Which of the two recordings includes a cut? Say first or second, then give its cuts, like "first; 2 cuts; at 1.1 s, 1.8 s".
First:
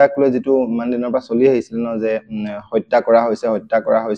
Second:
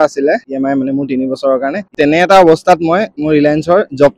second; 2 cuts; at 1.9 s, 3.1 s